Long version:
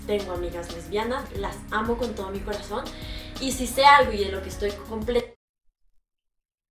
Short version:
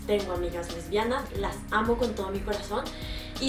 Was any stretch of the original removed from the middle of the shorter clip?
no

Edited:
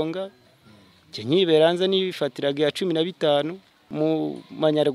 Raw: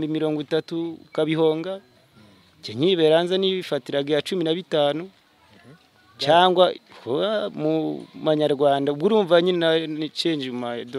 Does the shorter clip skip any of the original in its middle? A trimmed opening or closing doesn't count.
yes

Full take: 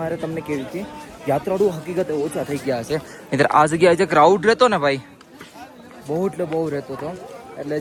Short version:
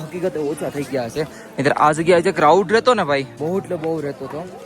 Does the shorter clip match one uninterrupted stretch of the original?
no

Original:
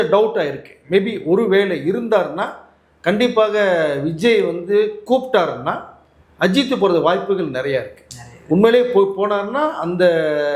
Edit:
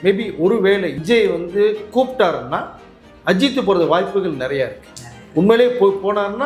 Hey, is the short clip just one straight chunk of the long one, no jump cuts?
no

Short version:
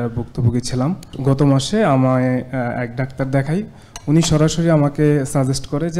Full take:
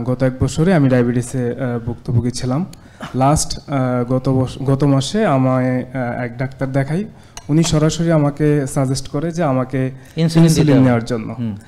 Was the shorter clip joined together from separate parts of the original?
yes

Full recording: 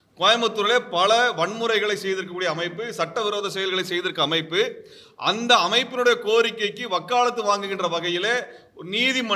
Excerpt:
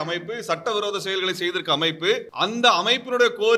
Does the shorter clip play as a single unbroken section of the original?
no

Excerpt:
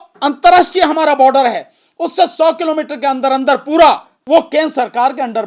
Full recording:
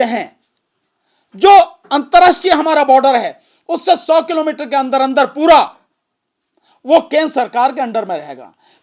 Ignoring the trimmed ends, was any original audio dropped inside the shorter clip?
yes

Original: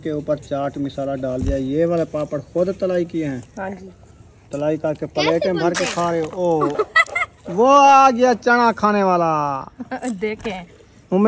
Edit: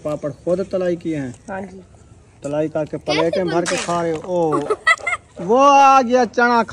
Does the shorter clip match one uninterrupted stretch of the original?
yes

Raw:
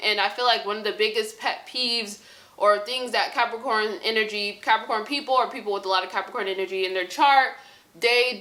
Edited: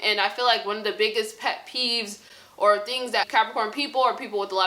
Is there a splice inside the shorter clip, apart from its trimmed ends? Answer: yes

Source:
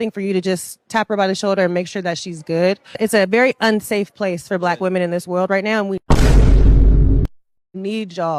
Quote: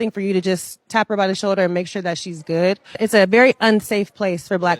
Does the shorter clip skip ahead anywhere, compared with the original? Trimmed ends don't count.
no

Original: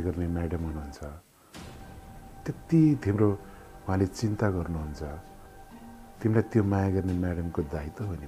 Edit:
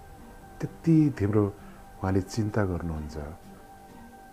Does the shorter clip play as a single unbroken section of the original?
yes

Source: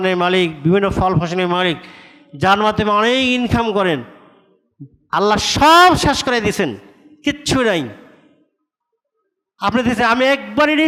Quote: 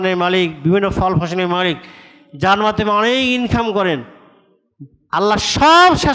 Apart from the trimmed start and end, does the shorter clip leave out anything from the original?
no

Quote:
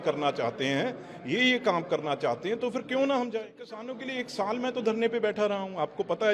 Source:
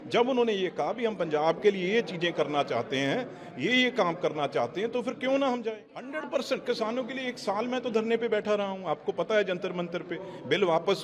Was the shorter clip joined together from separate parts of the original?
yes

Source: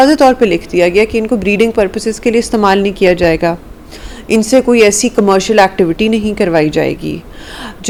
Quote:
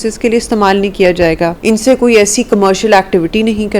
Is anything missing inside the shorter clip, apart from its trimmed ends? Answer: yes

